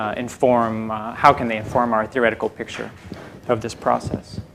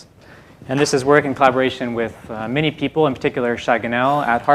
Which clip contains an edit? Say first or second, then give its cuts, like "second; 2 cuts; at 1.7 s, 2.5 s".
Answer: second; 1 cut; at 2.3 s